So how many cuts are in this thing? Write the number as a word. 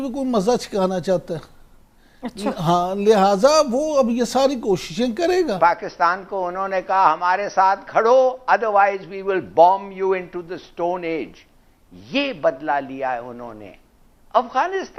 zero